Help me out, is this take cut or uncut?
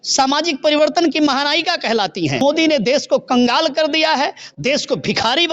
cut